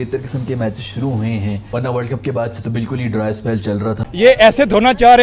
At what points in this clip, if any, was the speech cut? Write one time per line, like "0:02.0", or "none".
0:04.0

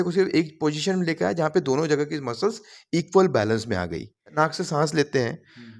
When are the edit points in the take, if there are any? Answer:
0:04.3

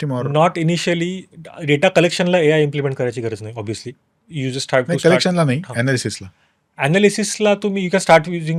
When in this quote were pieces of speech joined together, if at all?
none

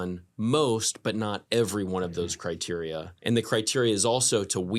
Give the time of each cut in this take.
0:03.2

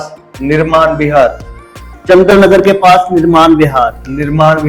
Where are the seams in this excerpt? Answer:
none

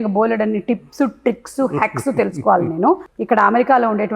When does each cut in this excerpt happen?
0:03.1

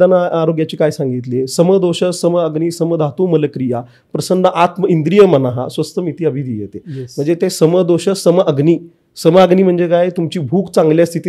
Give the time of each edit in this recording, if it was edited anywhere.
none

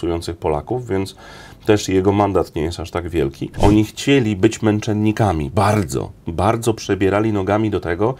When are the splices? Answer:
0:03.4

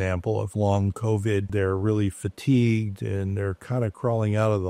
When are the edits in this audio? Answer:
0:01.5

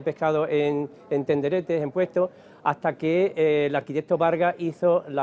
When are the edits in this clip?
none

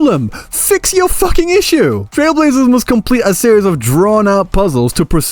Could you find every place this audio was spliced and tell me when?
none

